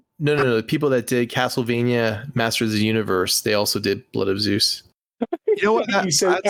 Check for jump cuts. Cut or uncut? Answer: uncut